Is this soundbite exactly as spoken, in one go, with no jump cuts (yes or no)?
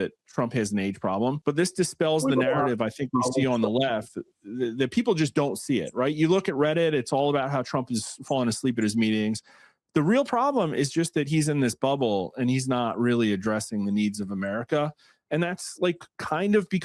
no